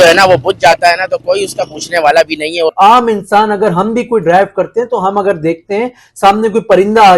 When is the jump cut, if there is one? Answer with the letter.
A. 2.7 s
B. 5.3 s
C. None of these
A